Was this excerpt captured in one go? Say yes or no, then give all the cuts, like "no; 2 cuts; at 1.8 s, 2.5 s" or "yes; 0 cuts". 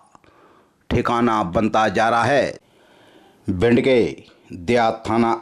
no; 1 cut; at 2.6 s